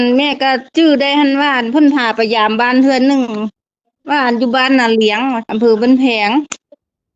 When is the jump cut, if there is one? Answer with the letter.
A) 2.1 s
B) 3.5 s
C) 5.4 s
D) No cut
C